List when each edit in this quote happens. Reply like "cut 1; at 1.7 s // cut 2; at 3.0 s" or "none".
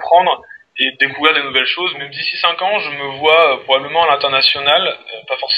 cut 1; at 2.1 s